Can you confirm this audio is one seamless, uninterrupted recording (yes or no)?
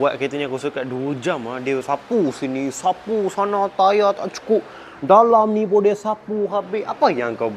yes